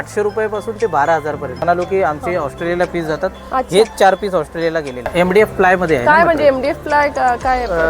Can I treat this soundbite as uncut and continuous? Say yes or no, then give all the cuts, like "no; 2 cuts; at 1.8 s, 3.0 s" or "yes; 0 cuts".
no; 2 cuts; at 1.6 s, 5.1 s